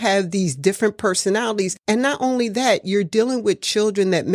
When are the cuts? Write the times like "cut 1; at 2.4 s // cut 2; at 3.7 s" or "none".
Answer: cut 1; at 1.8 s